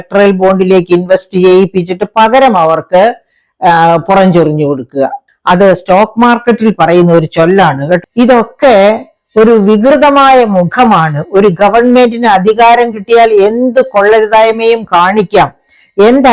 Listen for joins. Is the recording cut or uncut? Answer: cut